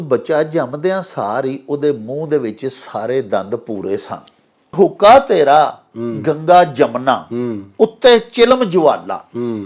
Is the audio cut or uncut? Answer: cut